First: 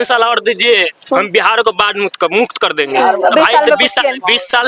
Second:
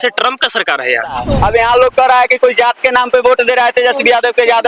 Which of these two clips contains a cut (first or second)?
second